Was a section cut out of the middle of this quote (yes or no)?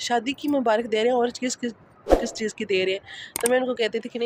no